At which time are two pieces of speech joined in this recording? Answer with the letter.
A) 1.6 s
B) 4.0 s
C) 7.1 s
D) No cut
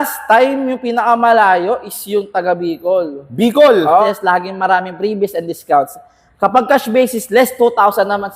B